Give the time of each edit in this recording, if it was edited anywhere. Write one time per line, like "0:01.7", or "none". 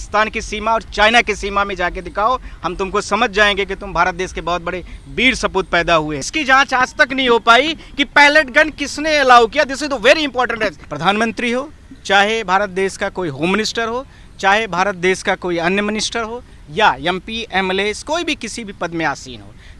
0:06.3
0:10.8